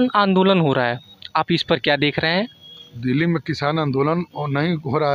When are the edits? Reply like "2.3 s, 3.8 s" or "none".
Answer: none